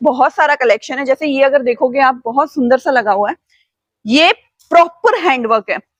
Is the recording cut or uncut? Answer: uncut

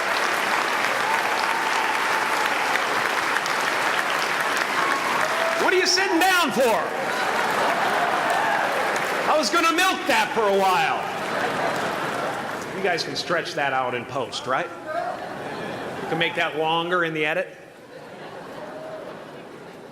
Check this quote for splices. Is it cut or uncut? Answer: cut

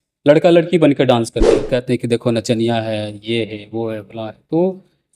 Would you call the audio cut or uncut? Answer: cut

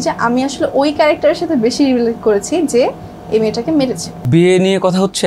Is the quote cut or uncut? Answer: cut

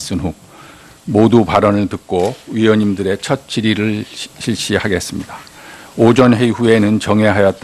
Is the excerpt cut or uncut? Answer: uncut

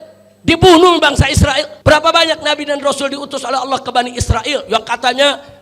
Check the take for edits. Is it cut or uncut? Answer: cut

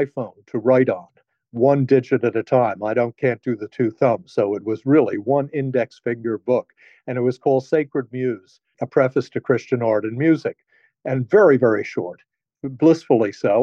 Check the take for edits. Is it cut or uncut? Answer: uncut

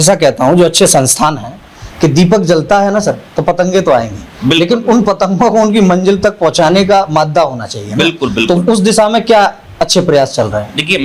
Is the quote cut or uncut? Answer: uncut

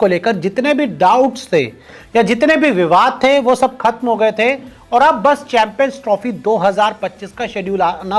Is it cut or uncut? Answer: uncut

